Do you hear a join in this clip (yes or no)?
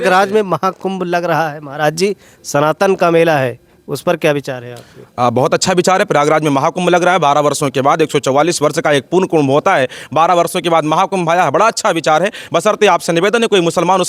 no